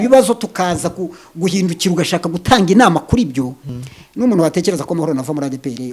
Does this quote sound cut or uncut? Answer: cut